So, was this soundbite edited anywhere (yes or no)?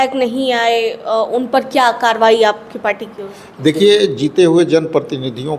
no